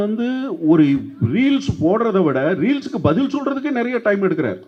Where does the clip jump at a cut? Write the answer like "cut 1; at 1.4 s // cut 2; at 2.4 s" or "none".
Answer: none